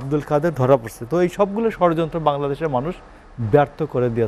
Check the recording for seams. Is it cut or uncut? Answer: uncut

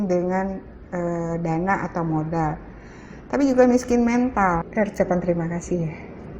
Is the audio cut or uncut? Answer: cut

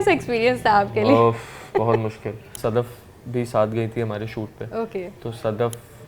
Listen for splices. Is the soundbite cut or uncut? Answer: cut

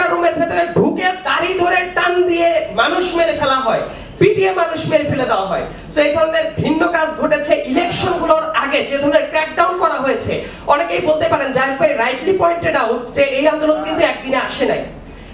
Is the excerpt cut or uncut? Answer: uncut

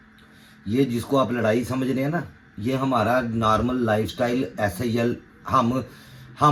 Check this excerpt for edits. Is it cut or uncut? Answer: uncut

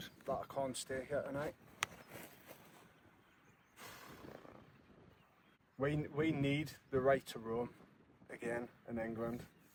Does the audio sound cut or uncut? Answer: uncut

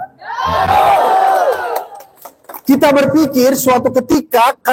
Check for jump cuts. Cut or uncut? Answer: uncut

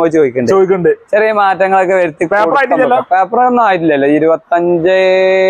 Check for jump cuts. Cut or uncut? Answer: uncut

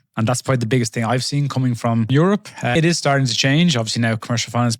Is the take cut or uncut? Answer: cut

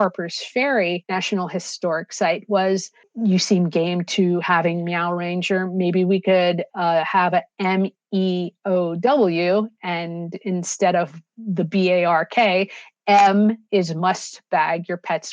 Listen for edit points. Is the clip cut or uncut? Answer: cut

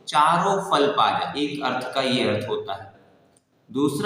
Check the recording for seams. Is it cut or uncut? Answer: cut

